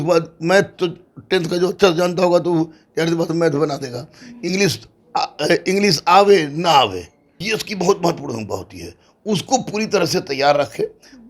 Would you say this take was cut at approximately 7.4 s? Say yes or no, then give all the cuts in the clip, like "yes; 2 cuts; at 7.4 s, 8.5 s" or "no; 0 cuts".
yes; 1 cut; at 7.4 s